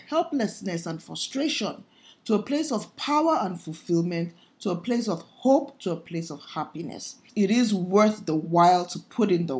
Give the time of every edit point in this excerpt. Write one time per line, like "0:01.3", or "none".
0:07.2